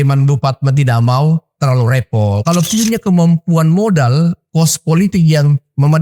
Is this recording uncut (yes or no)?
no